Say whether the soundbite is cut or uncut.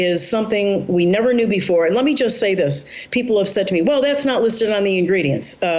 uncut